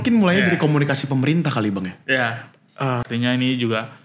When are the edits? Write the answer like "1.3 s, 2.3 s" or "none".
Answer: 3.1 s